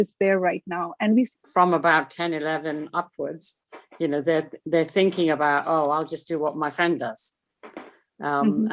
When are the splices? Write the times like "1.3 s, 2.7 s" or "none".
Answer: 1.3 s